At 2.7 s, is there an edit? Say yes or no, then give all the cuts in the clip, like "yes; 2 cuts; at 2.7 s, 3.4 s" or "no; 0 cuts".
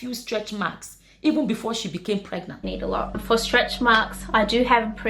yes; 1 cut; at 2.7 s